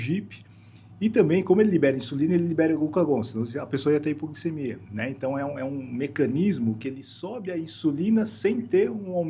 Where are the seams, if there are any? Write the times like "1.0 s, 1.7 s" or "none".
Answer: none